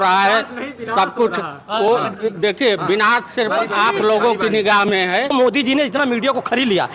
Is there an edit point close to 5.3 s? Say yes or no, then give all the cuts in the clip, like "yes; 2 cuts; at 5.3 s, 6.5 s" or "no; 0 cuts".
yes; 1 cut; at 5.3 s